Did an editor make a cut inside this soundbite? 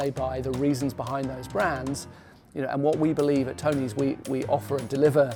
no; 0 cuts

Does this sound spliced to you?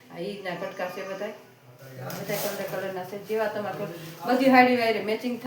no; 0 cuts

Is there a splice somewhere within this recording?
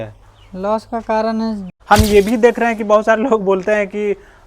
yes; 1 cut; at 1.7 s

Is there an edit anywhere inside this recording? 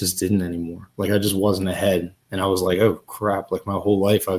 no; 0 cuts

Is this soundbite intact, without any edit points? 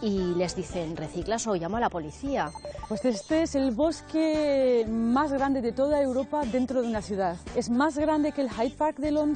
no; 2 cuts; at 2.8 s, 7.4 s

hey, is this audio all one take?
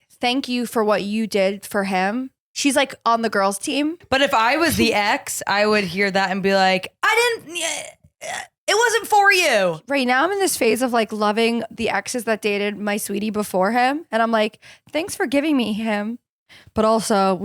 no; 2 cuts; at 4.0 s, 9.8 s

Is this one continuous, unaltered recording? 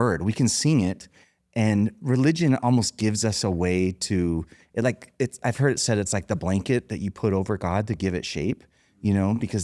yes; 0 cuts

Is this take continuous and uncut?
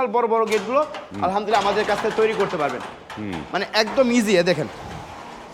yes; 0 cuts

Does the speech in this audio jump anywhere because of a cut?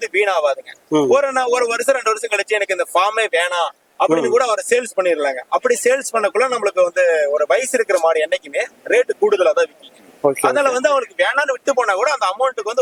no; 0 cuts

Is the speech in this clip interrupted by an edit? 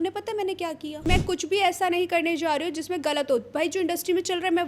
yes; 1 cut; at 1.0 s

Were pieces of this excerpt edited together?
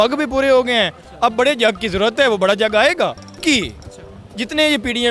yes; 1 cut; at 3.2 s

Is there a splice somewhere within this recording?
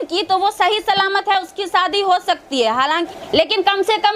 yes; 1 cut; at 3.1 s

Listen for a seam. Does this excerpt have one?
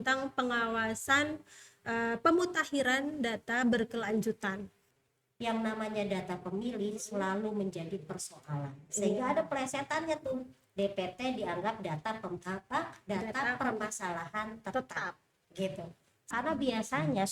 yes; 2 cuts; at 4.8 s, 16.3 s

